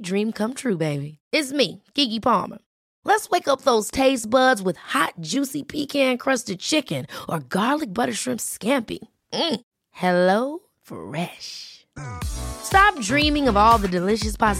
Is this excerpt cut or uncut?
uncut